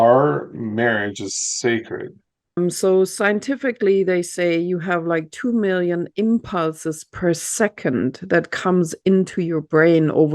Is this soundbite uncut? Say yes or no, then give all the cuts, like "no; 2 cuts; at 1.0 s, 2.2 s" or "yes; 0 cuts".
no; 1 cut; at 2.6 s